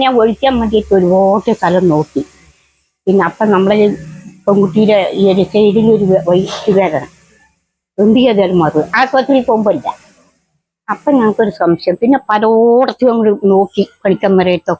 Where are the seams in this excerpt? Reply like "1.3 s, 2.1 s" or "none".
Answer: none